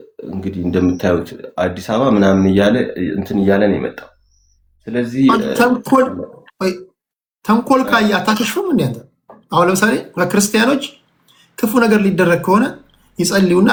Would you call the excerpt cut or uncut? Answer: uncut